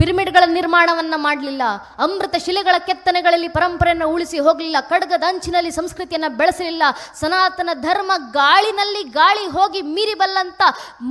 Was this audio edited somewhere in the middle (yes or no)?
no